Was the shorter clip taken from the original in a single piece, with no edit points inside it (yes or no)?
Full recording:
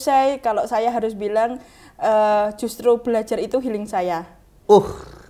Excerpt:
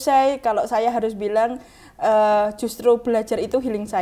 yes